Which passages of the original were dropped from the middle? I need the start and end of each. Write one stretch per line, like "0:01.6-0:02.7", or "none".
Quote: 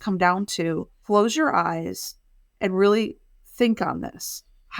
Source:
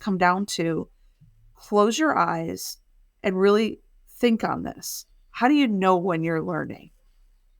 0:00.9-0:01.5